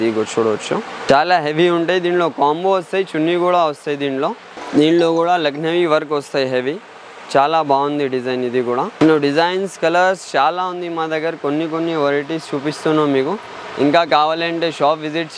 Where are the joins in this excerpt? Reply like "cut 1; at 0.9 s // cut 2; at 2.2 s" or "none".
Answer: cut 1; at 1.0 s // cut 2; at 4.5 s // cut 3; at 8.9 s